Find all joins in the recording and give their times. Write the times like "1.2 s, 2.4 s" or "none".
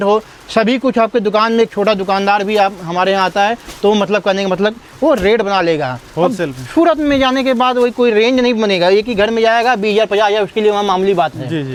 none